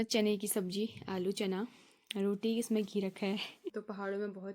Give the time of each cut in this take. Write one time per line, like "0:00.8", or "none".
0:03.6